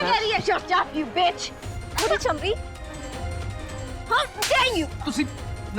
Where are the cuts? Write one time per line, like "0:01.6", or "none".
0:02.6
0:04.1